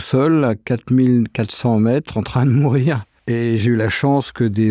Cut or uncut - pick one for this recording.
cut